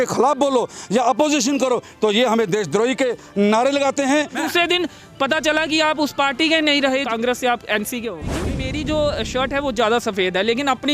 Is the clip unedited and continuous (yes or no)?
no